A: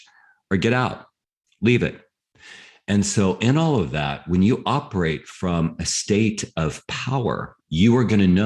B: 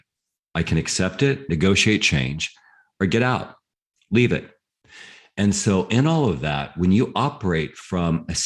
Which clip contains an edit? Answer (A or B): B